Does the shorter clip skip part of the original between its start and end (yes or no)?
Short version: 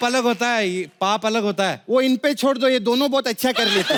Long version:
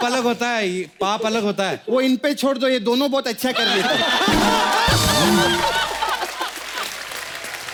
no